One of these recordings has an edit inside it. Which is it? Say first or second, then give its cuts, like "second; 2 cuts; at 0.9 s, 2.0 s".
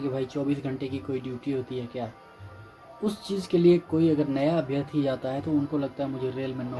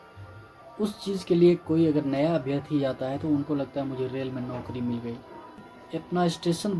second; 1 cut; at 5.7 s